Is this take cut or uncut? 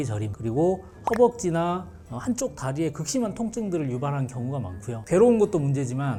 uncut